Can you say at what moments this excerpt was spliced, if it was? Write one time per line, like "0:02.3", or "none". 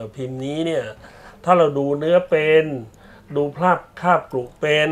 none